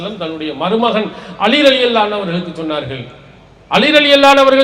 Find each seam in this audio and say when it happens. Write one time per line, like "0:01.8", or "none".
none